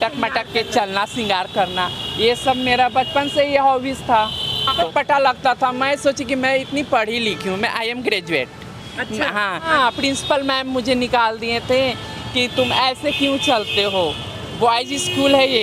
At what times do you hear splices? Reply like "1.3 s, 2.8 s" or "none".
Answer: 4.9 s, 9.7 s